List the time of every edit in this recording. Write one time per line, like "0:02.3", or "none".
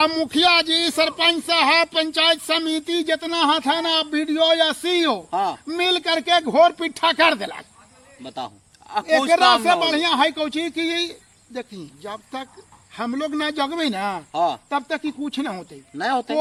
none

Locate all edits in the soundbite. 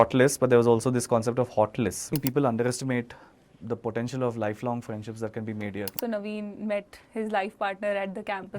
0:02.1
0:06.0

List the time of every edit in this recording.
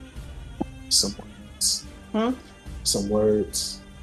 none

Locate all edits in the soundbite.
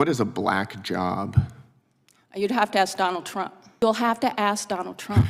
0:03.6

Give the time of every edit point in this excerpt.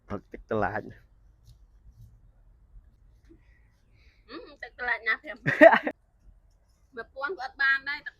0:03.0
0:05.9

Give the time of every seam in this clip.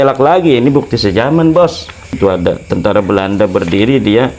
0:02.2

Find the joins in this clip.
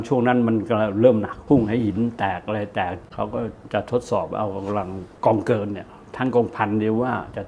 0:01.3
0:03.1
0:05.0

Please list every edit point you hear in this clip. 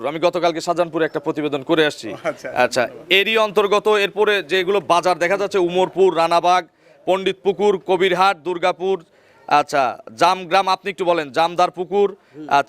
none

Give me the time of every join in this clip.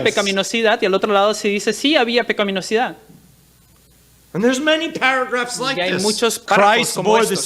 0:06.4

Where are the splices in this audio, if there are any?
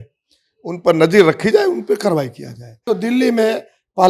0:02.8

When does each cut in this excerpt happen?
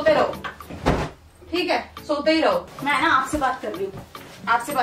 0:02.7

